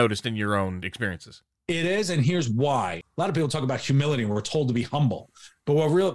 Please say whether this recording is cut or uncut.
cut